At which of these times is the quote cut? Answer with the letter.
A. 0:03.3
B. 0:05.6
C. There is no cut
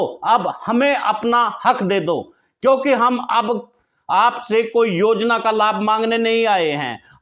C